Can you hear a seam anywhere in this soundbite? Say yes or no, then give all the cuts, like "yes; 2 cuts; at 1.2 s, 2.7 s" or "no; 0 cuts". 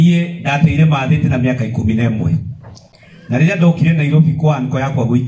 no; 0 cuts